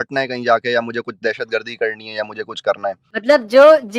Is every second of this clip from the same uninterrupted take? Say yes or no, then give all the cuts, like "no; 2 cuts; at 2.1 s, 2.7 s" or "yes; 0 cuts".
no; 1 cut; at 3.1 s